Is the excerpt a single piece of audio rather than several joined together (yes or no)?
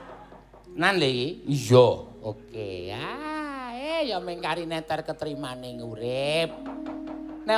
yes